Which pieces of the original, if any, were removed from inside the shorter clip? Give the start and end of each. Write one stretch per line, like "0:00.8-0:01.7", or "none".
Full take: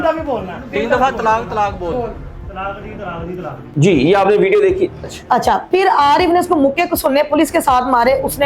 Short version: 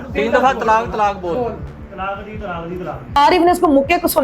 0:03.7-0:06.0